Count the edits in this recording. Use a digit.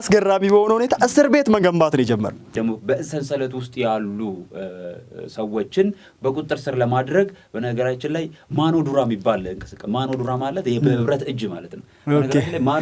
1